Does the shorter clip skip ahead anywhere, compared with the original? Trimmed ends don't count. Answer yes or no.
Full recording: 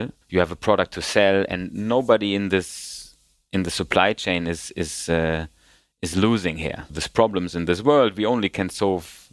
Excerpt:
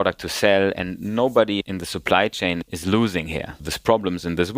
yes